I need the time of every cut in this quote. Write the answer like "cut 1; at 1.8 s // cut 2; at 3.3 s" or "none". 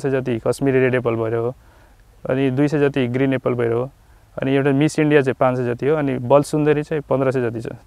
none